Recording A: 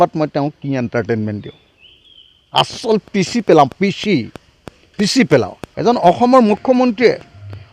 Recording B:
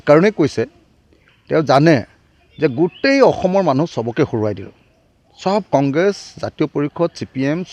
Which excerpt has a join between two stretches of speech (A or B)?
A